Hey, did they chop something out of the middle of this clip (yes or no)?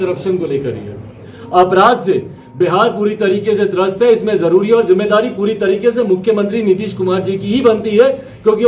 yes